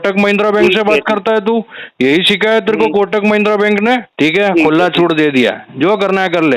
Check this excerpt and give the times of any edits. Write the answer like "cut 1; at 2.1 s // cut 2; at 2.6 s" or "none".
cut 1; at 4.1 s